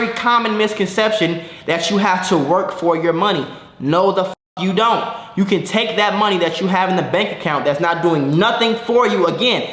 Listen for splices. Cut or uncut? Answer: uncut